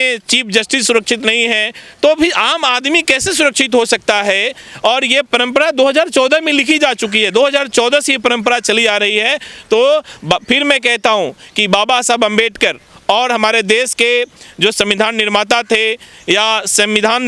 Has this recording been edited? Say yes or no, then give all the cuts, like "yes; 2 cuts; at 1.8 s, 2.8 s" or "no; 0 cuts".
no; 0 cuts